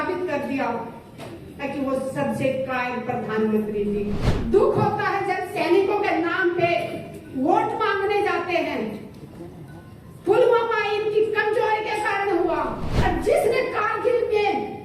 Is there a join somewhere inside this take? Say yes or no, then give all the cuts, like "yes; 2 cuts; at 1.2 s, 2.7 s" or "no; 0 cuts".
yes; 2 cuts; at 4.3 s, 12.9 s